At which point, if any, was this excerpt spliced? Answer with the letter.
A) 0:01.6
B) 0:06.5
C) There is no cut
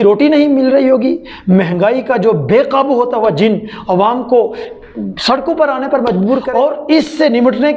B